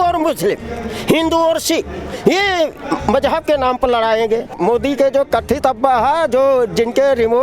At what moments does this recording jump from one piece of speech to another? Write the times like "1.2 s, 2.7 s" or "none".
4.6 s